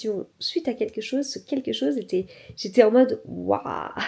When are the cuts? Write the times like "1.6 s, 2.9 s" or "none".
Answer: none